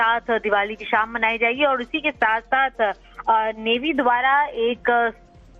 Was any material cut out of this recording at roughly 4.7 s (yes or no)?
no